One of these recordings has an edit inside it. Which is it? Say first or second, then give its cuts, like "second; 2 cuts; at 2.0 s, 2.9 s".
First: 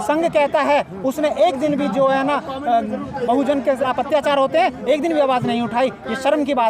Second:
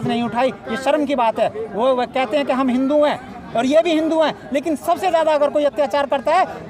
first; 1 cut; at 3.8 s